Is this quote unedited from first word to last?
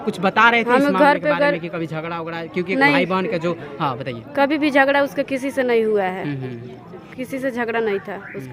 yes; 0 cuts

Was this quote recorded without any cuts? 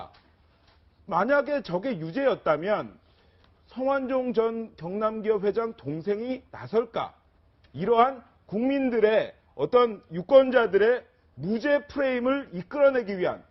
no; 1 cut; at 11.0 s

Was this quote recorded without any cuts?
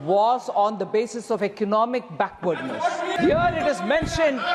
no; 1 cut; at 3.1 s

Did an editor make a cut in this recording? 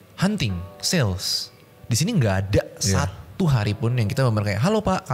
no; 0 cuts

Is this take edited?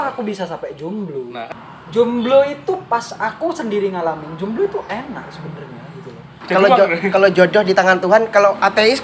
yes; 2 cuts; at 1.4 s, 6.4 s

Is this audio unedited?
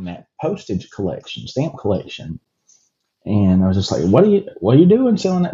yes; 0 cuts

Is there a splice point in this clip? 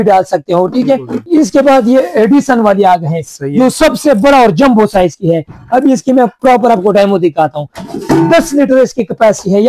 yes; 1 cut; at 1.1 s

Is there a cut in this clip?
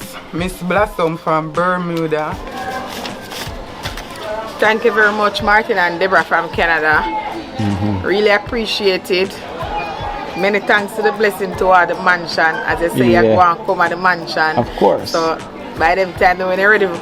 yes; 1 cut; at 2.4 s

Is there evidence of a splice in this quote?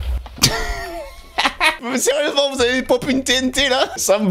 yes; 1 cut; at 1.8 s

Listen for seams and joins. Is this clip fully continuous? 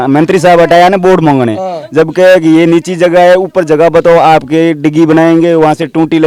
yes; 0 cuts

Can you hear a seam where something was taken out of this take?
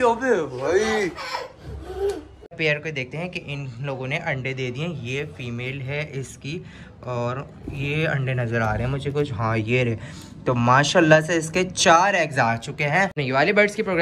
yes; 2 cuts; at 2.6 s, 13.2 s

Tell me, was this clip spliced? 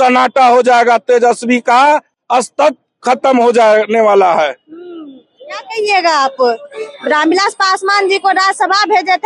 no; 0 cuts

